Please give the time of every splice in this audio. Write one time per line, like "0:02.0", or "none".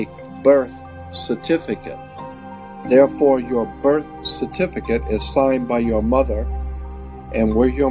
0:02.4